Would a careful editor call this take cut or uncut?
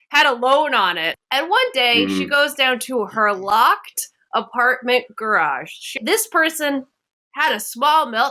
cut